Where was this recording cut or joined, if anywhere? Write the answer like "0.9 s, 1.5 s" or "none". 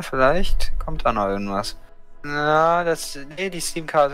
1.8 s